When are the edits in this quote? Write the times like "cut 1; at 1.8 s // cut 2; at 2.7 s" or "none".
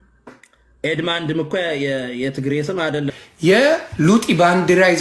cut 1; at 3.1 s